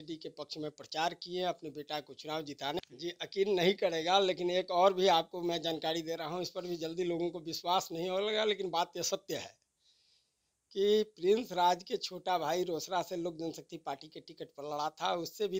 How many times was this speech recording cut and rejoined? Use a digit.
1